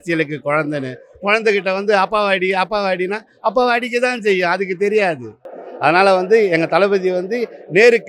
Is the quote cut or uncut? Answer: uncut